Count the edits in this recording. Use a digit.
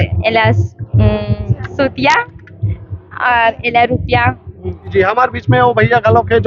1